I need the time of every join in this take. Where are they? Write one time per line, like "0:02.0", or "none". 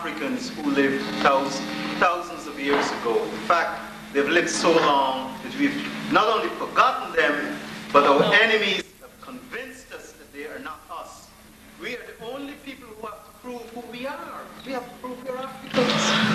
0:10.8